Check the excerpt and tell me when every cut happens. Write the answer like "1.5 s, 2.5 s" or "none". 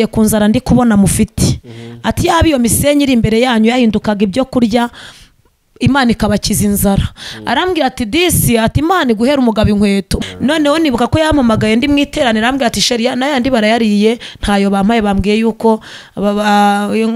10.1 s

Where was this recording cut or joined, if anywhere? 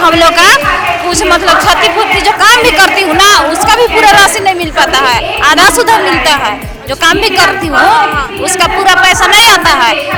none

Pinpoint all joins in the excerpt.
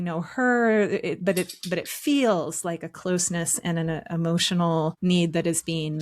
5.0 s

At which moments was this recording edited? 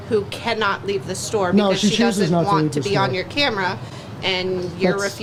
none

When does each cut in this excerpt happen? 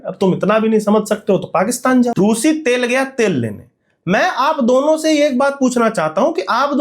2.1 s

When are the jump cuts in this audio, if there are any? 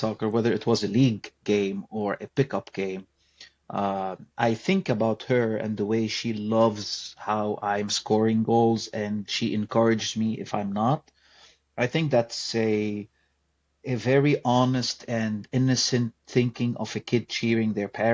none

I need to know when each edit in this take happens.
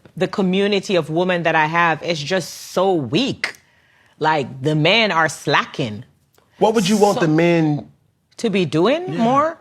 3.6 s

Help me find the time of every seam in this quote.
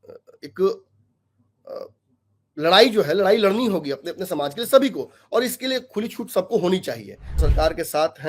7.4 s

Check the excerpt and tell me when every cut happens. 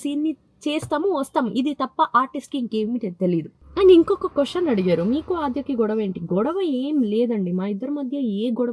3.6 s

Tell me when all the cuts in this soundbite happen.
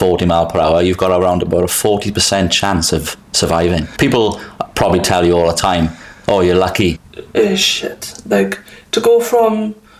3.9 s, 7.1 s

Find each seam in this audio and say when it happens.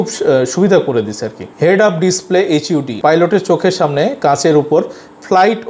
2.9 s

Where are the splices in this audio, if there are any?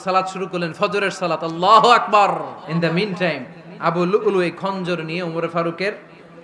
2.6 s

